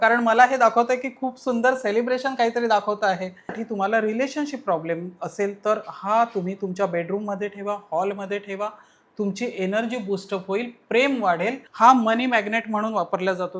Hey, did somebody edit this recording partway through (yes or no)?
yes